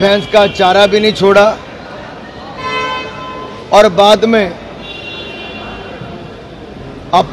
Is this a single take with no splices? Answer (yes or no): yes